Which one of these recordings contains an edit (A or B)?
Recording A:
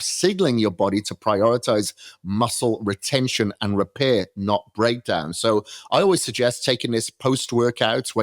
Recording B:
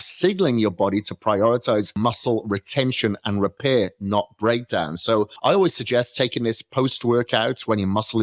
B